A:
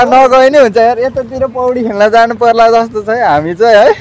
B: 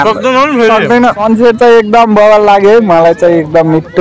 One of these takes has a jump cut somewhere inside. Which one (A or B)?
B